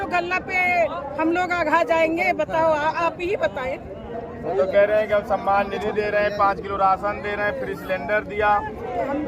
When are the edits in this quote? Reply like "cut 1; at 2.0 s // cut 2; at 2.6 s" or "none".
none